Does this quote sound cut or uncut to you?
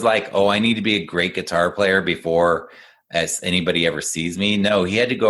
uncut